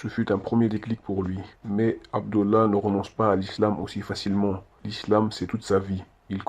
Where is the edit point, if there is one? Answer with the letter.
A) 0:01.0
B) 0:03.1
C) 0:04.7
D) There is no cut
B